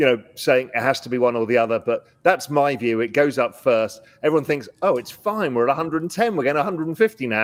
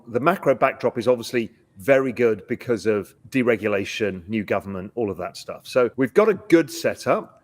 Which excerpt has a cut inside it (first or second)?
second